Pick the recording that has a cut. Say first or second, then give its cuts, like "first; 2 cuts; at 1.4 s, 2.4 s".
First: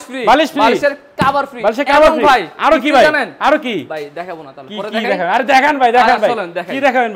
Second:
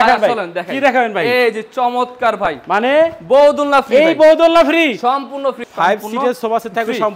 second; 1 cut; at 5.6 s